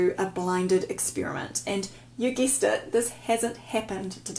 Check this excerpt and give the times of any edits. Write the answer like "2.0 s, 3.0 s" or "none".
none